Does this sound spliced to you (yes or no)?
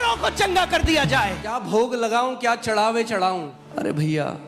yes